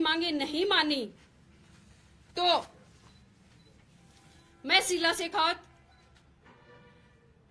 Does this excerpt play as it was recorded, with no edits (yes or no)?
yes